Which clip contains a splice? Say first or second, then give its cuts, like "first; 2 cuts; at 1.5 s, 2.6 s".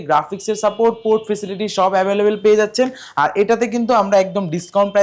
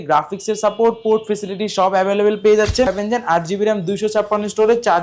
second; 1 cut; at 2.9 s